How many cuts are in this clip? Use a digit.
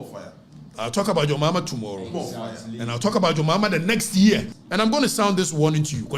1